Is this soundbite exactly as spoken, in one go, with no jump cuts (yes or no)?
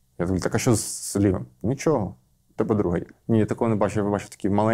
no